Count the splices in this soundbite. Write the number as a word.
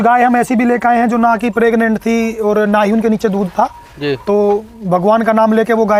zero